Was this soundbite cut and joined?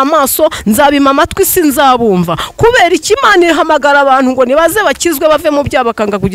no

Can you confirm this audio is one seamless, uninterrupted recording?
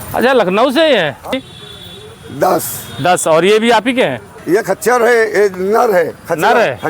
no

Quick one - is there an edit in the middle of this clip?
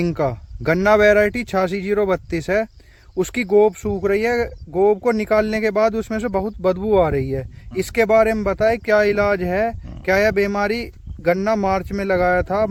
no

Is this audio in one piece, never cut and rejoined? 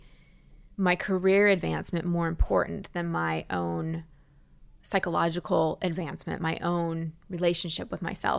yes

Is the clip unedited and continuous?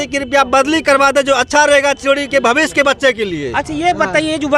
yes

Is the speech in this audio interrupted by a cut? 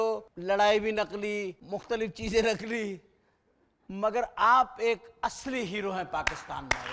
no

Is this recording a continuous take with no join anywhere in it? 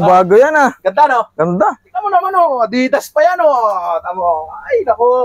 yes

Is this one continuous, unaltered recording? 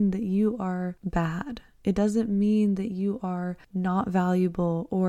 no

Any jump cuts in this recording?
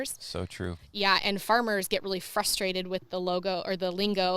no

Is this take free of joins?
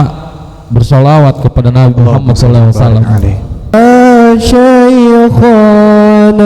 no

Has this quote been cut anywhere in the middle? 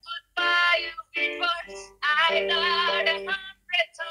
no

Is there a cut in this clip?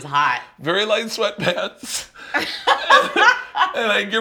no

